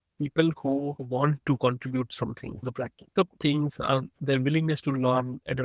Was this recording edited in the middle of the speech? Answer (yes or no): yes